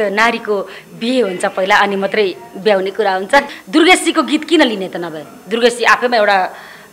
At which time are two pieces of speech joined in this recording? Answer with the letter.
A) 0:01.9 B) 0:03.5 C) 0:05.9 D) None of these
B